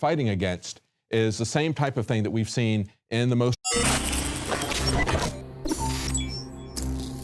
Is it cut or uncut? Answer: uncut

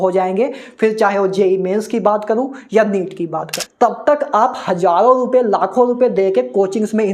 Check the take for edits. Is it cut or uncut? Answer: cut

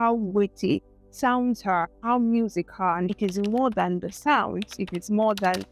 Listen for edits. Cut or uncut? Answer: cut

